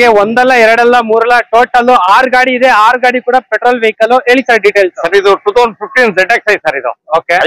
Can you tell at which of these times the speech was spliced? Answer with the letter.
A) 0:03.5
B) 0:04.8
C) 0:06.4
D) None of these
D